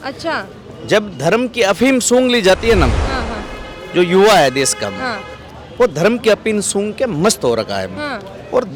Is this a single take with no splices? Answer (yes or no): yes